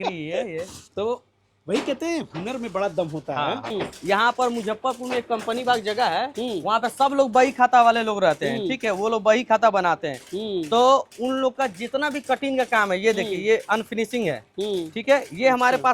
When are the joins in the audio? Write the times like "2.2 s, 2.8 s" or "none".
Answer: 3.7 s